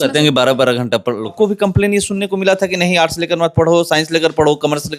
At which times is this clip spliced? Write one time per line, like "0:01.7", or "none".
0:01.3